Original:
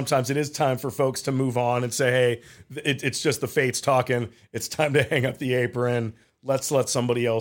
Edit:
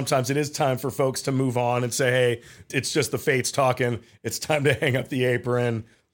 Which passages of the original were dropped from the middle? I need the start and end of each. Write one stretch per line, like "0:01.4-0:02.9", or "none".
0:02.7-0:03.0